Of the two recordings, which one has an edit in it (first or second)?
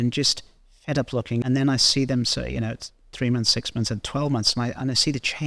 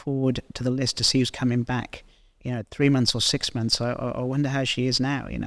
first